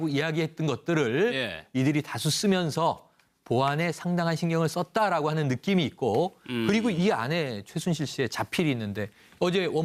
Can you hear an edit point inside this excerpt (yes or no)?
no